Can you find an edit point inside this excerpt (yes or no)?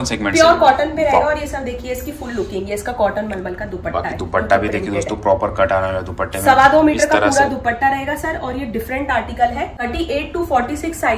yes